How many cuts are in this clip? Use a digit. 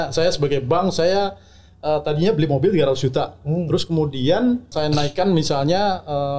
1